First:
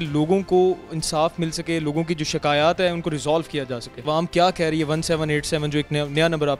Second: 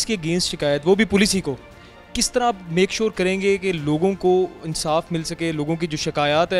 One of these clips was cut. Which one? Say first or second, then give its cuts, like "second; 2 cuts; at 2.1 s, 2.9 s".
first; 1 cut; at 3.9 s